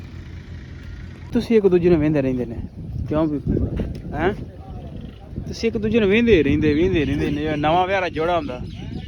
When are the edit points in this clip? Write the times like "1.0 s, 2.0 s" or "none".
1.3 s